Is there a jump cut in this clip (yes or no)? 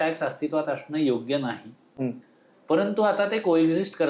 no